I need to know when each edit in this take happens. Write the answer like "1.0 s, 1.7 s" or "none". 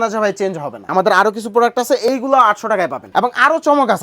0.8 s, 3.0 s